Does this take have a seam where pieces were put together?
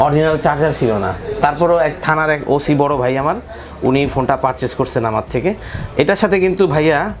no; 0 cuts

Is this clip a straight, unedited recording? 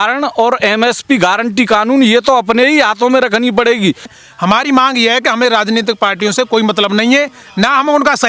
no; 1 cut; at 4.1 s

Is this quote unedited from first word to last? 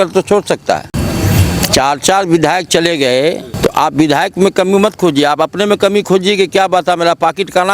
no; 2 cuts; at 0.9 s, 3.5 s

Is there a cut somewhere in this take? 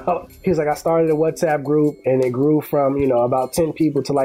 no; 0 cuts

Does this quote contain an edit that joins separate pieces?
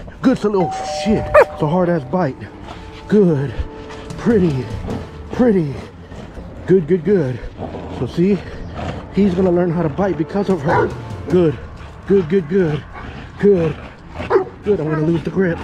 no; 0 cuts

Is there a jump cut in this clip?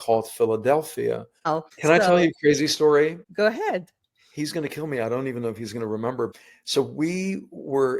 yes; 1 cut; at 1.4 s

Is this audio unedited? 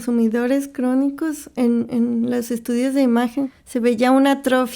no; 1 cut; at 3.4 s

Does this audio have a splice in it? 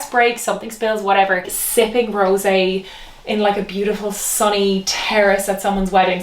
yes; 1 cut; at 1.6 s

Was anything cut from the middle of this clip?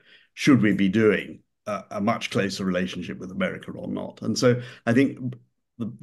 no; 0 cuts

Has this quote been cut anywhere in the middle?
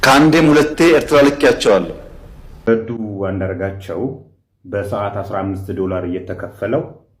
yes; 1 cut; at 2.4 s

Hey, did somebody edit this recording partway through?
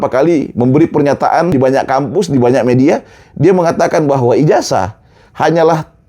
yes; 1 cut; at 1.5 s

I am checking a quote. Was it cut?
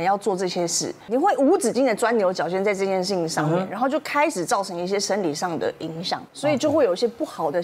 yes; 2 cuts; at 1.1 s, 6.2 s

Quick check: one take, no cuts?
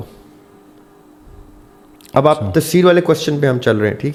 yes; 0 cuts

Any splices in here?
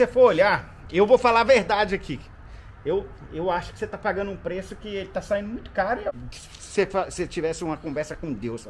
yes; 1 cut; at 6.1 s

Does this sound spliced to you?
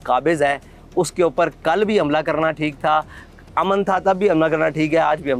no; 0 cuts

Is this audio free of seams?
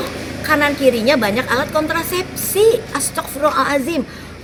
yes; 0 cuts

